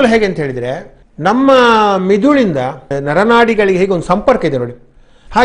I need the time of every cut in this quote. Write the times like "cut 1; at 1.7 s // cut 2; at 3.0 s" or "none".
cut 1; at 2.9 s